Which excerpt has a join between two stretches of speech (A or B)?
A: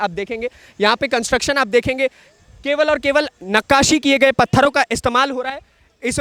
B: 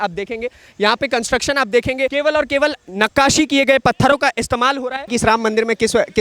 B